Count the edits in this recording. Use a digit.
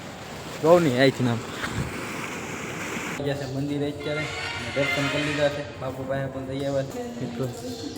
2